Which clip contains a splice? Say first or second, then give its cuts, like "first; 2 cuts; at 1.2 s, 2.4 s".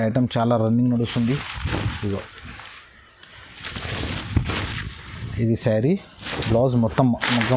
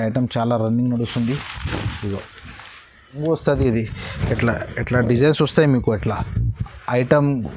second; 1 cut; at 3.2 s